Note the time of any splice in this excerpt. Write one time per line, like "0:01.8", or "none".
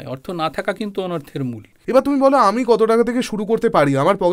0:01.8

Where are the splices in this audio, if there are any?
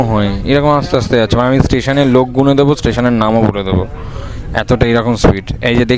none

